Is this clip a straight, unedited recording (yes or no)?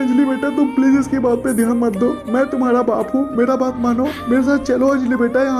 yes